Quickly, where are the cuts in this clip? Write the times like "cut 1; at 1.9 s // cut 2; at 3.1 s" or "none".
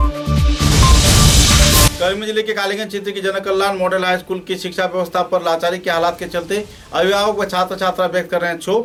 none